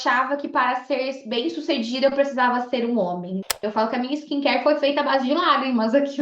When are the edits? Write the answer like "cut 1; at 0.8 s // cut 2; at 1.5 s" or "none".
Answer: cut 1; at 3.6 s